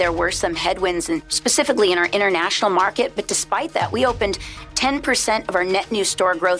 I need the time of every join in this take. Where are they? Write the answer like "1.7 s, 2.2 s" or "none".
1.3 s